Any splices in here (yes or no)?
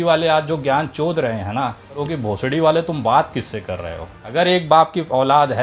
yes